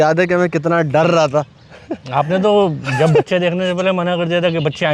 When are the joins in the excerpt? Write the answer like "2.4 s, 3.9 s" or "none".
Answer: none